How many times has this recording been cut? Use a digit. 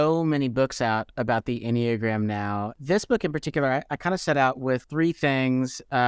2